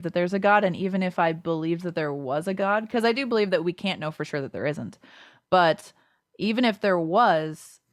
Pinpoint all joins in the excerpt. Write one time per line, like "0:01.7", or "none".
none